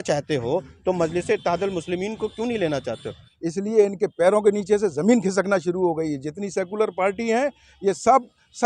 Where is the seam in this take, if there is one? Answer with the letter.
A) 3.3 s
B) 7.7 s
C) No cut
A